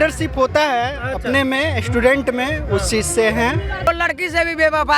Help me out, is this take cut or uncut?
cut